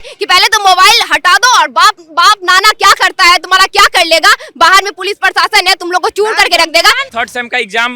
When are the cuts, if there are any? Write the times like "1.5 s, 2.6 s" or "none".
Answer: 7.0 s